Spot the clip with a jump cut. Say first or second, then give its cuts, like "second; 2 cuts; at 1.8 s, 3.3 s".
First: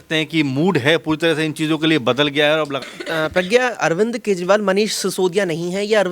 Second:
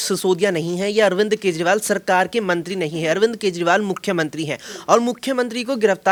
first; 1 cut; at 2.8 s